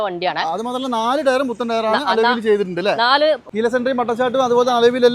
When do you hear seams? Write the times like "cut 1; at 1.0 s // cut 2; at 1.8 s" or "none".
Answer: cut 1; at 3.5 s